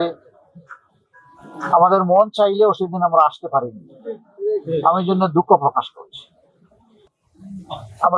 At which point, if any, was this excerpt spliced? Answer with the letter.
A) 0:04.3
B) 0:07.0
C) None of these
B